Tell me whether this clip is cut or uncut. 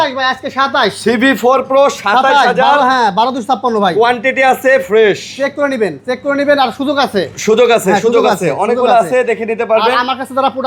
uncut